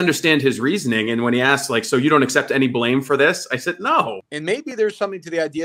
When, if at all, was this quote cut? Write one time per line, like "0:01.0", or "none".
0:04.3